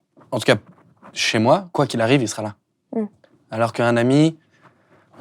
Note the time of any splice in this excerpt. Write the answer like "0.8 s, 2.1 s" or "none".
1.7 s